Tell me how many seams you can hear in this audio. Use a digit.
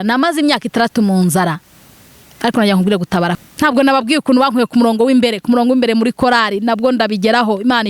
1